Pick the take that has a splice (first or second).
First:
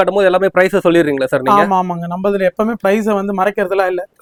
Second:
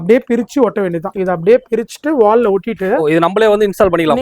second